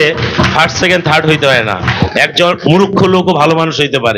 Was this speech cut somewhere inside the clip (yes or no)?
no